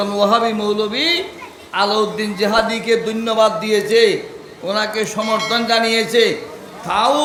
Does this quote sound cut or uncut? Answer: uncut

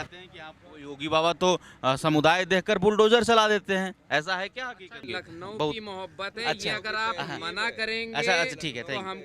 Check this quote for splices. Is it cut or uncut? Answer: cut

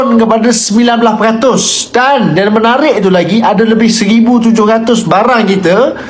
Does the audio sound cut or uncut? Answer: uncut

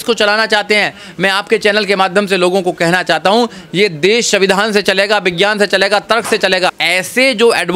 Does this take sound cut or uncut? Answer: cut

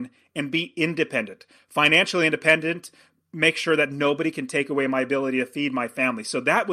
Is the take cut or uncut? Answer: uncut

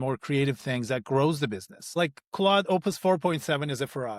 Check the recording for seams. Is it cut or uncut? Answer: cut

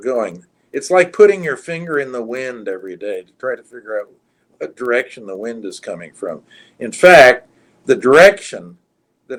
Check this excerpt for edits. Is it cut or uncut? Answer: uncut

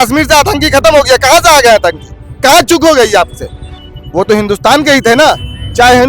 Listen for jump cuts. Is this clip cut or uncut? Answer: cut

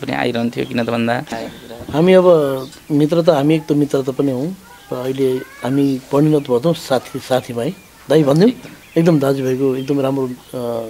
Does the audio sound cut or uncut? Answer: cut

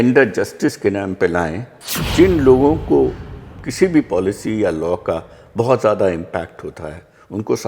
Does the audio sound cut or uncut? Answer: cut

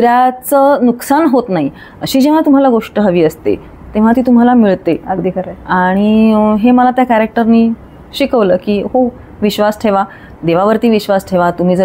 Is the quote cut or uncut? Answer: uncut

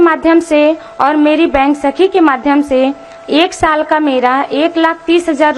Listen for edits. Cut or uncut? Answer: uncut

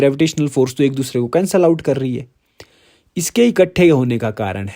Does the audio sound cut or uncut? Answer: uncut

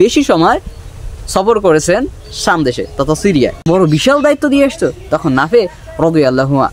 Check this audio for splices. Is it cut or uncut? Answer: cut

